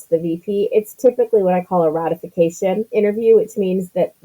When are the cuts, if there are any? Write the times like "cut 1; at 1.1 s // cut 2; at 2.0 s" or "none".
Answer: cut 1; at 2.9 s